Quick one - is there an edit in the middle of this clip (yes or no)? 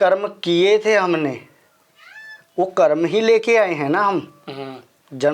no